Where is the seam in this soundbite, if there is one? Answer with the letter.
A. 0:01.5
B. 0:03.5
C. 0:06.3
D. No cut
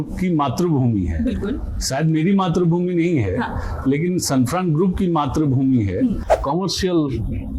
C